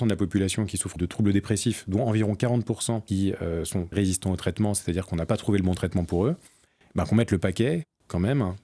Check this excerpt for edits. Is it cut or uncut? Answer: cut